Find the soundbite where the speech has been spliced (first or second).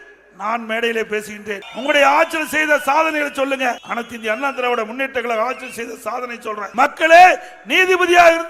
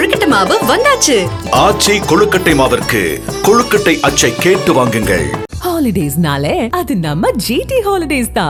first